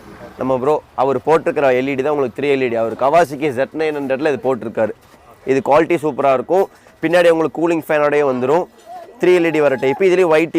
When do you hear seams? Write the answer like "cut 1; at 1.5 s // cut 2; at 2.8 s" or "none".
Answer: none